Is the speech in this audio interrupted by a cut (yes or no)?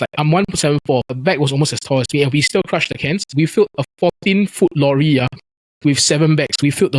no